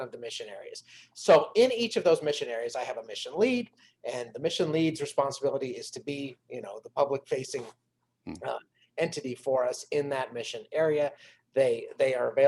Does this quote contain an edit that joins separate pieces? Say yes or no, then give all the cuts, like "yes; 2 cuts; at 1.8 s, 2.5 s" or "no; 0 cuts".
no; 0 cuts